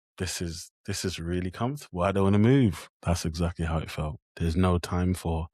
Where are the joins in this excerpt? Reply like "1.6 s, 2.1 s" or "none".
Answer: 4.2 s